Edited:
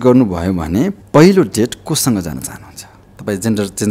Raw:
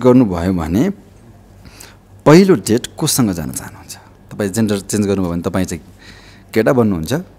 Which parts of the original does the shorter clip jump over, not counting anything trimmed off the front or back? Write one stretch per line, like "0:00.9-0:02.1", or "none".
0:01.0-0:02.1

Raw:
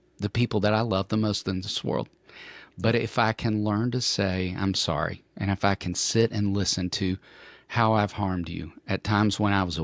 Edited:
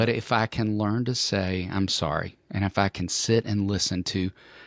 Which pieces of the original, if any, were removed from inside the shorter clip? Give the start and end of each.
none

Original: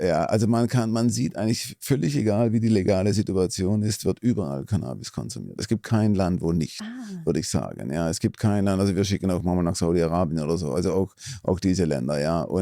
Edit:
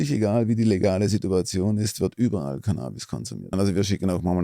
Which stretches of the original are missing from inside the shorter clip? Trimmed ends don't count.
0:05.6-0:08.7

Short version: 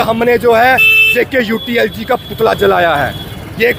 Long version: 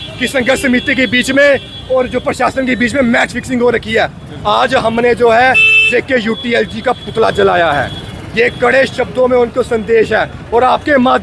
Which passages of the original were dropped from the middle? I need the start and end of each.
none

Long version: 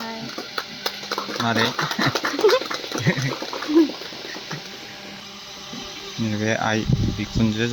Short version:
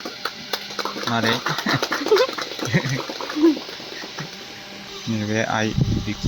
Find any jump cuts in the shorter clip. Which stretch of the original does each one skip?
0:05.2-0:06.0

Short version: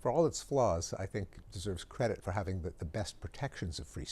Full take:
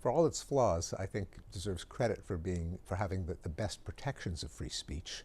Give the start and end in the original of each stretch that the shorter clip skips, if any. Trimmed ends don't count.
0:02.2-0:02.8

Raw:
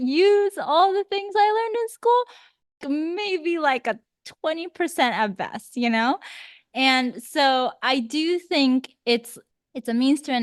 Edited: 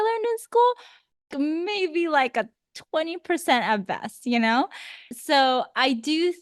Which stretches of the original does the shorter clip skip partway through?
0:06.6-0:07.2

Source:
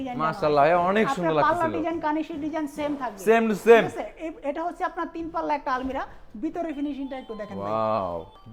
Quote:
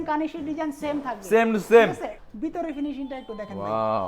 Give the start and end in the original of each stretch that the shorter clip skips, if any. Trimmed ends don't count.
0:04.1-0:06.2

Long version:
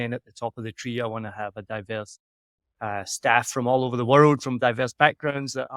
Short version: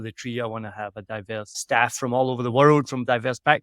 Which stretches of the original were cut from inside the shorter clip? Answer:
0:02.2-0:03.1

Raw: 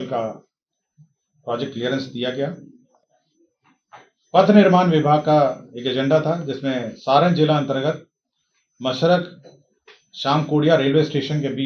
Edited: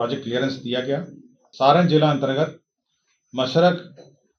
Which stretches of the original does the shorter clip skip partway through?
0:03.0-0:06.9

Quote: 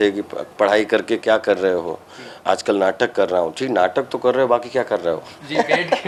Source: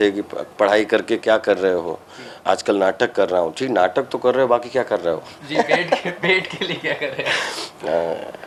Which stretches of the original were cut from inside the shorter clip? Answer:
none

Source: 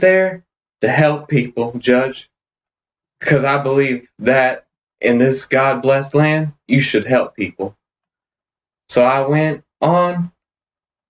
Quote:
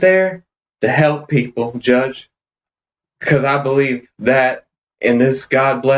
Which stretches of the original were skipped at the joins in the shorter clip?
none

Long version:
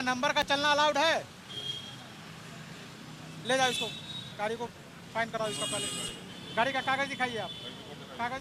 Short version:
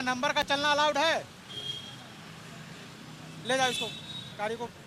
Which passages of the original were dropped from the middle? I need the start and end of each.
none

